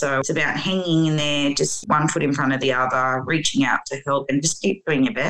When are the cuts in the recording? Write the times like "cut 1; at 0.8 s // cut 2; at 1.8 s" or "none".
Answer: none